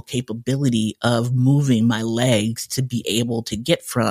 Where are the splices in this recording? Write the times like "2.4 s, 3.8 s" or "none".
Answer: none